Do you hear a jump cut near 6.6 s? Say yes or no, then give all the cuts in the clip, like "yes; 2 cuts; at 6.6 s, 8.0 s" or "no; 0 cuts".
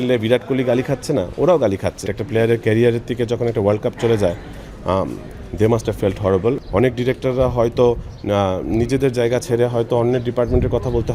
yes; 2 cuts; at 2.1 s, 6.6 s